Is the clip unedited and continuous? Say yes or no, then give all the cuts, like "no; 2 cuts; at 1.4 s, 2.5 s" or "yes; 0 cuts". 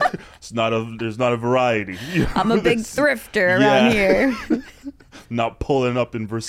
yes; 0 cuts